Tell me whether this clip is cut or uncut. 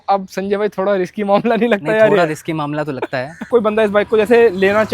cut